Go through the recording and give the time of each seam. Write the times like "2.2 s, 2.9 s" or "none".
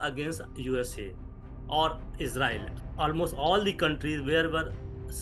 2.7 s